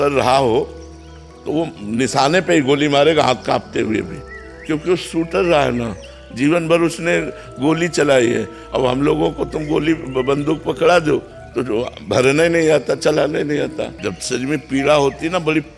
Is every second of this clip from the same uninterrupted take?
no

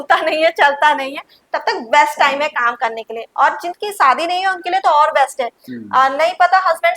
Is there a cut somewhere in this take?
no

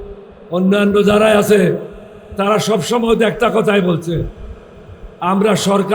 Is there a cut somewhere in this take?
no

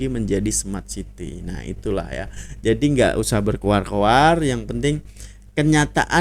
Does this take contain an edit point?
no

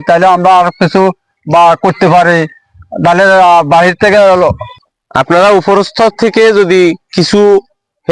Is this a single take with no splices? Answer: no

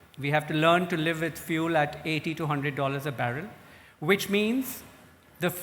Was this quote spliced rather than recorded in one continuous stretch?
no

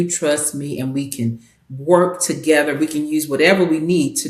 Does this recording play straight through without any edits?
yes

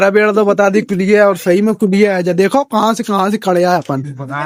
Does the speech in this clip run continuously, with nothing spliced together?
yes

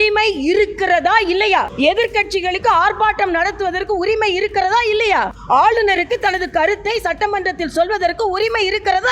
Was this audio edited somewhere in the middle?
yes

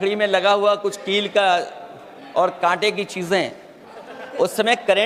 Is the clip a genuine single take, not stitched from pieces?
yes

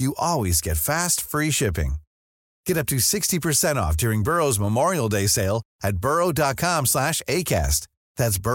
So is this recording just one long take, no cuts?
yes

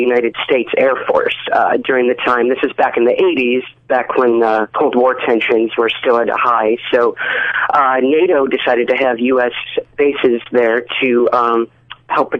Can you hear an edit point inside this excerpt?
yes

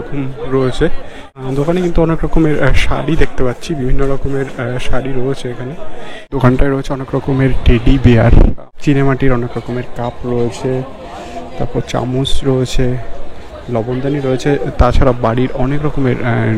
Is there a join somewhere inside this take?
yes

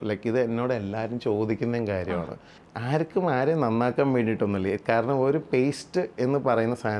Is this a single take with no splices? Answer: yes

